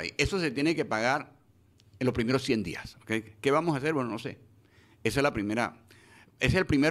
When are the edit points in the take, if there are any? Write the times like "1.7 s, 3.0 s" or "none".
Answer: none